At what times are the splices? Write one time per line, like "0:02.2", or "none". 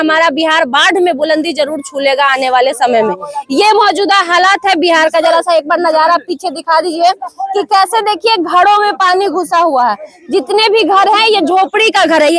none